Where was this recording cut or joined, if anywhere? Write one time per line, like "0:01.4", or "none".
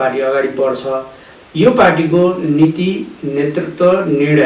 none